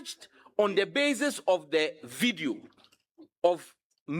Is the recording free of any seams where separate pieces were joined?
yes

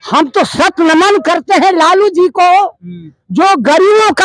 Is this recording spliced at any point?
no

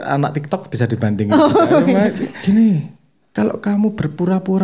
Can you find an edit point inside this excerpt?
yes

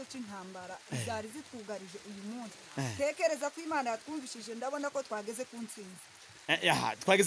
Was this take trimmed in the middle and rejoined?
no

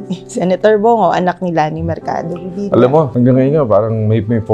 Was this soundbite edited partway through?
yes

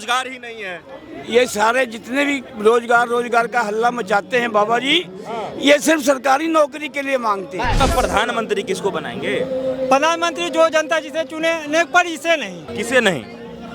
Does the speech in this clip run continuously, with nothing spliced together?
no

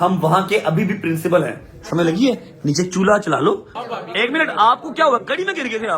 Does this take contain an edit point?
yes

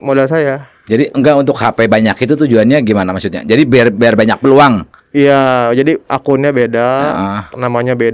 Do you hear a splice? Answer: no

